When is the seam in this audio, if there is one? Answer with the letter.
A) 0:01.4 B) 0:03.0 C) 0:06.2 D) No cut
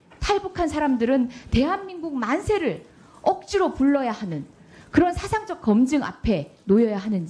D